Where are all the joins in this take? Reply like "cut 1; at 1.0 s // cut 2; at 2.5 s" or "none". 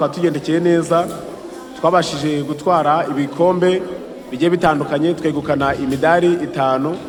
none